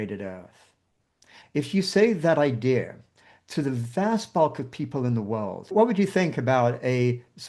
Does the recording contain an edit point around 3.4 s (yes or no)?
no